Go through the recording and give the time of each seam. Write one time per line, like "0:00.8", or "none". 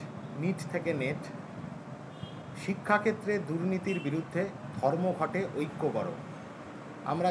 none